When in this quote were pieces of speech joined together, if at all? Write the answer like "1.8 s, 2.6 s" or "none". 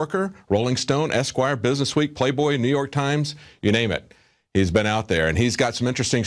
4.0 s